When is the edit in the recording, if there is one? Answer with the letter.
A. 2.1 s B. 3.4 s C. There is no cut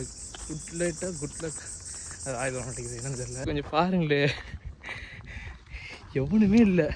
B